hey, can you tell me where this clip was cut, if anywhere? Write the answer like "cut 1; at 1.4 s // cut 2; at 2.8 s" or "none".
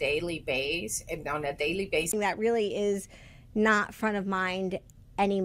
none